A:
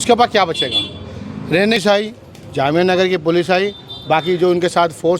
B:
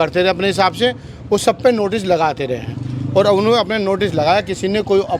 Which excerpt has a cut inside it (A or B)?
A